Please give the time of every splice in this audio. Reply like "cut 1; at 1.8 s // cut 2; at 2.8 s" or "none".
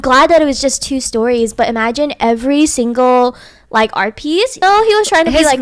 cut 1; at 4.6 s